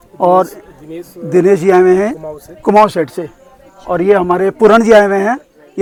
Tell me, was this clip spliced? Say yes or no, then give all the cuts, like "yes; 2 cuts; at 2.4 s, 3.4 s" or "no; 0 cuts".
no; 0 cuts